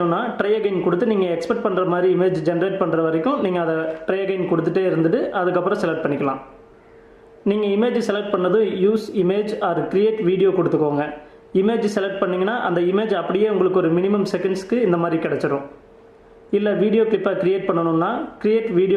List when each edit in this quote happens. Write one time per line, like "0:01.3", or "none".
0:03.0